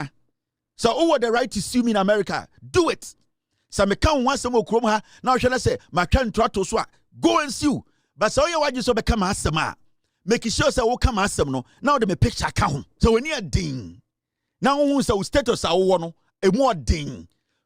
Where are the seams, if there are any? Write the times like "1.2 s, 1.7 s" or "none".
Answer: 12.9 s